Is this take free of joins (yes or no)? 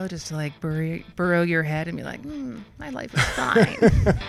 yes